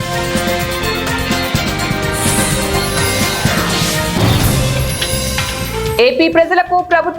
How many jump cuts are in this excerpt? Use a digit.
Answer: 1